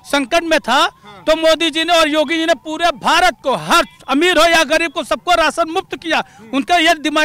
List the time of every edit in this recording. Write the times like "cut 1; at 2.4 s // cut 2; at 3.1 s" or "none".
none

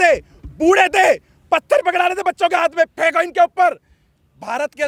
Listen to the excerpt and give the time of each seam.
none

